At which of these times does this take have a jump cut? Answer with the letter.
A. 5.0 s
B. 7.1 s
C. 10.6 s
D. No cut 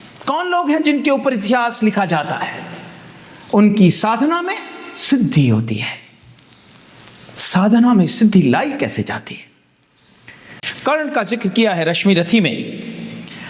C